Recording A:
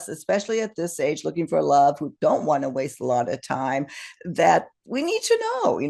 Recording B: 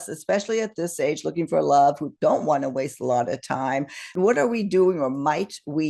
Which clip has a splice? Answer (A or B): B